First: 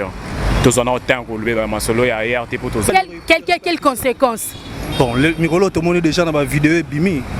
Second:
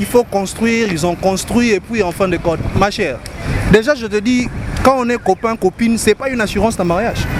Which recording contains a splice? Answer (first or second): first